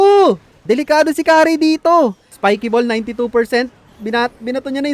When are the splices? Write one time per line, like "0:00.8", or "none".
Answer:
0:02.3